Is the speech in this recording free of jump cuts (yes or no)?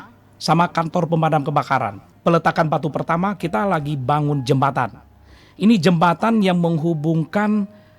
no